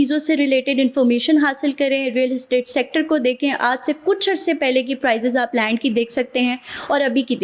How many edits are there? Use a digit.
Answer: 0